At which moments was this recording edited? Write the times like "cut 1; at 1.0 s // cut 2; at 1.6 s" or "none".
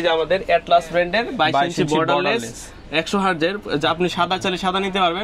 none